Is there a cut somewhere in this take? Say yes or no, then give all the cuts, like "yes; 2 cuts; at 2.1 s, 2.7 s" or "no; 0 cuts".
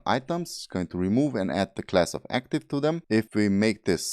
yes; 1 cut; at 3.2 s